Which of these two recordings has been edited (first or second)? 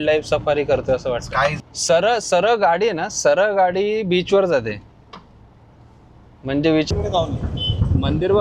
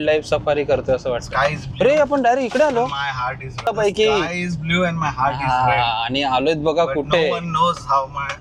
first